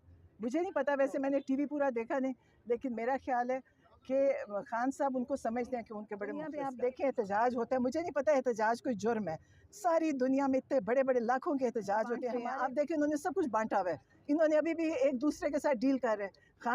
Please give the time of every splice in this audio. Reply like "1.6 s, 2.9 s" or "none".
6.5 s, 12.4 s